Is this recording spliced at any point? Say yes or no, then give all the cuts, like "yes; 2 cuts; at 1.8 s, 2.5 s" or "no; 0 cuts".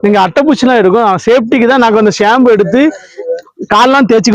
no; 0 cuts